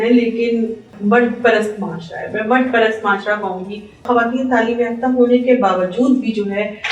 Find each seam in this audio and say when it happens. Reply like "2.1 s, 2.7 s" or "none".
0.9 s, 4.0 s